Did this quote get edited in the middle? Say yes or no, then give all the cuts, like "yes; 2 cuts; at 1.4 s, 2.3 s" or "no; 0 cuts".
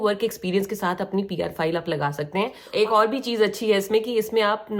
yes; 1 cut; at 2.6 s